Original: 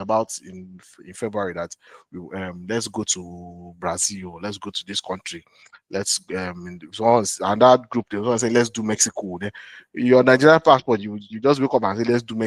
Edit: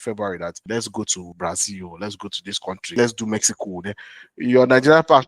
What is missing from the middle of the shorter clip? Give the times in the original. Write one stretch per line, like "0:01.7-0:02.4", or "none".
0:02.1-0:03.4
0:05.4-0:08.5